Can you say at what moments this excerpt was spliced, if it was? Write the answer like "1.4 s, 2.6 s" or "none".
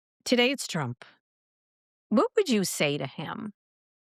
none

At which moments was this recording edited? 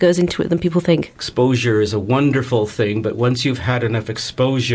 1.2 s

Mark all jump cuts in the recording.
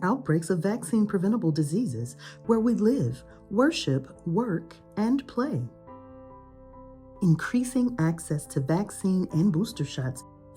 5.8 s, 7.1 s

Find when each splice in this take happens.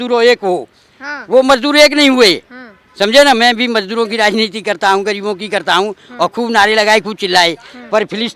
none

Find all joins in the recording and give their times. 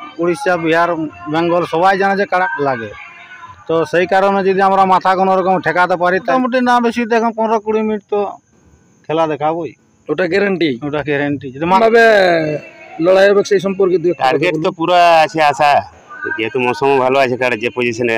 2.5 s, 6.3 s, 11.7 s

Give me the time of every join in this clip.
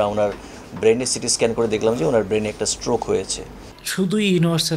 3.8 s

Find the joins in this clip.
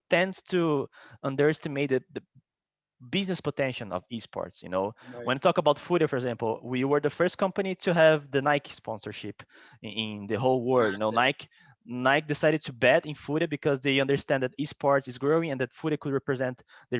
none

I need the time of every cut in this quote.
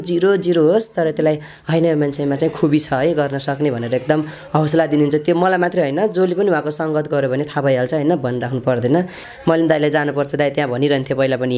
9.2 s

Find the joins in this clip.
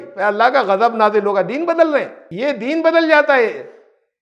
2.3 s

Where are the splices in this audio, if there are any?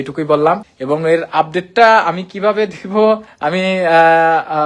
none

